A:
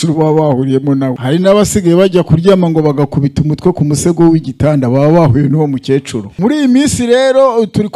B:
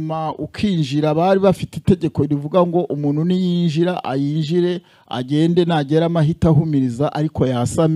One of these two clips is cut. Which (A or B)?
A